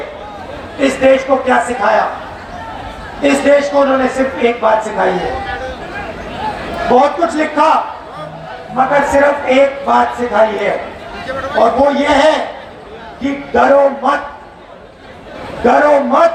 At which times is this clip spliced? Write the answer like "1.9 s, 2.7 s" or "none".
none